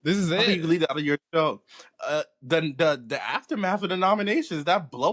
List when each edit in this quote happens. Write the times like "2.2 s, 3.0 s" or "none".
none